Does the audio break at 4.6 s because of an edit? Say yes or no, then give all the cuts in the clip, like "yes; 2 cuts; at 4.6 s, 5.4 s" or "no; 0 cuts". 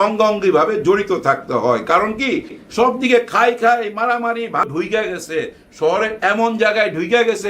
yes; 1 cut; at 4.6 s